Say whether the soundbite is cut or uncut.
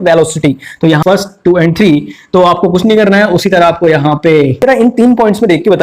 cut